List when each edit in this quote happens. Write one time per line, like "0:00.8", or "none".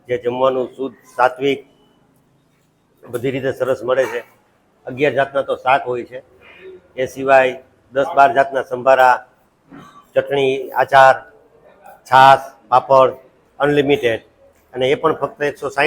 none

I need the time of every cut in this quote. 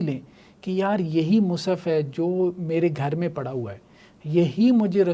none

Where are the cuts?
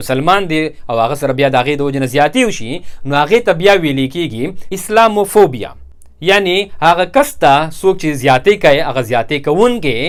none

